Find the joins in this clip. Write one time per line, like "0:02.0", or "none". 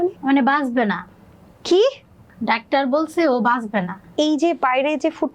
0:04.1